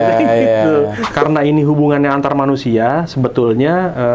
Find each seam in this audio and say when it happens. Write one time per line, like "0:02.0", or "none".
0:01.1

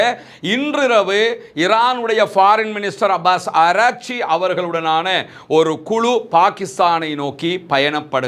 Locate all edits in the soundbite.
none

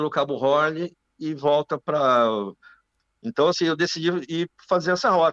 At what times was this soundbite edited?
0:02.9

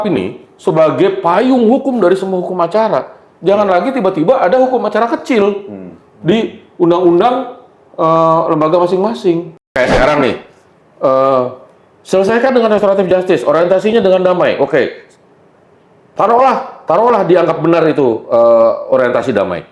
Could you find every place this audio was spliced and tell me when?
0:09.7

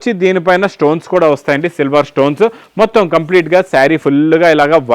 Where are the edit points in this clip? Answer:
none

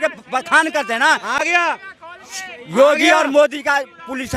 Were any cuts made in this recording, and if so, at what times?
none

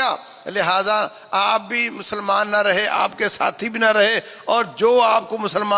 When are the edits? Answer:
none

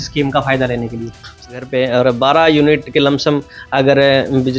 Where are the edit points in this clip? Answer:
0:01.5

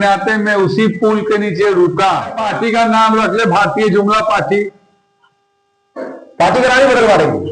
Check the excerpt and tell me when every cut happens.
0:02.5

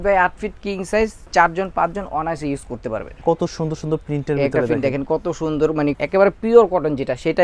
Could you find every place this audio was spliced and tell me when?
0:03.1
0:06.0

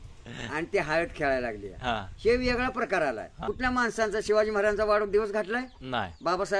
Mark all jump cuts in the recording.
0:03.4

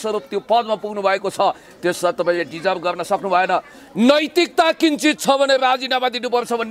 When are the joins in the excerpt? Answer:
none

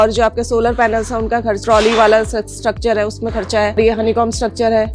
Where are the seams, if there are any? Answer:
0:01.6
0:03.8

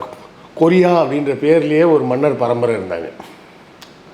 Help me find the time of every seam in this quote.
none

